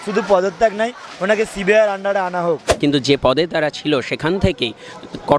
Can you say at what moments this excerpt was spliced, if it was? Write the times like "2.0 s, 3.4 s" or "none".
2.7 s